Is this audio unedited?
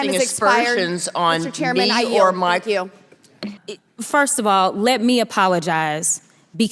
no; 1 cut; at 3.5 s

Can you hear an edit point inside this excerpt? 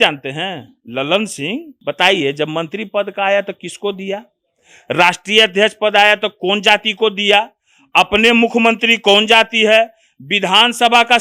yes; 1 cut; at 1.7 s

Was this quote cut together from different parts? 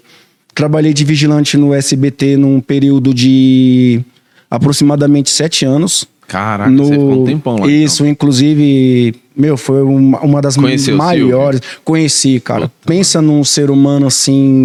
no; 0 cuts

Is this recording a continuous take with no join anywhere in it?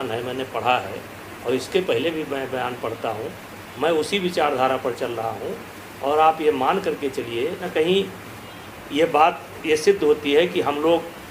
no; 1 cut; at 7.7 s

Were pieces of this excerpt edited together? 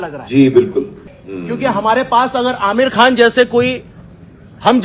yes; 1 cut; at 1.1 s

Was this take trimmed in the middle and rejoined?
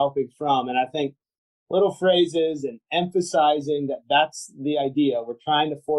no; 0 cuts

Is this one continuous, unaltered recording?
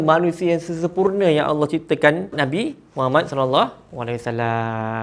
no; 1 cut; at 2.3 s

